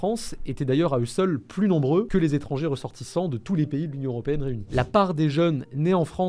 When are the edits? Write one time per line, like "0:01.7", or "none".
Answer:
0:04.7